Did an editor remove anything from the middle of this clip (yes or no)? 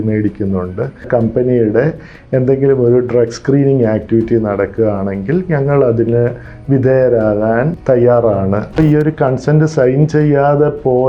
yes